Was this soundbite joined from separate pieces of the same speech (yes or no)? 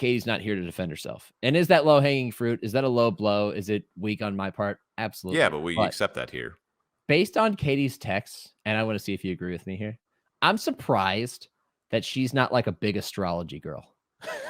no